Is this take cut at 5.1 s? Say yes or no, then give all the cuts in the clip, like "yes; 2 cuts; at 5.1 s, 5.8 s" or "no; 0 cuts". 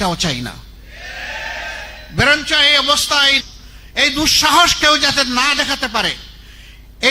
no; 1 cut; at 3.4 s